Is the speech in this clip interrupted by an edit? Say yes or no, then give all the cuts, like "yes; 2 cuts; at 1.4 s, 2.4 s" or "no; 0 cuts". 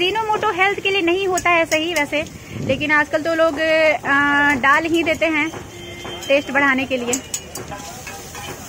no; 0 cuts